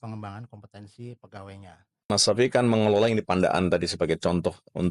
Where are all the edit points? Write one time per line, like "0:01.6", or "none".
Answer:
0:01.9